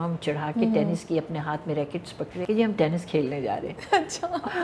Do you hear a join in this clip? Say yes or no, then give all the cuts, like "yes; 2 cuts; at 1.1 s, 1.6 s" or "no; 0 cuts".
yes; 1 cut; at 2.4 s